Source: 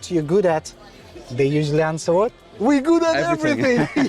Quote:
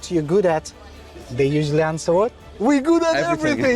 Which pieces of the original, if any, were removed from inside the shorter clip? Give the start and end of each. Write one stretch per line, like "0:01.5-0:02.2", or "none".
none